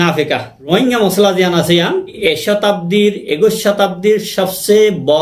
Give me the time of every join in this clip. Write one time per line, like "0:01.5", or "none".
0:00.7
0:02.2